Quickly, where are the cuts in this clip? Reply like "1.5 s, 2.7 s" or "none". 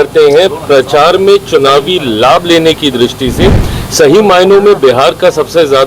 none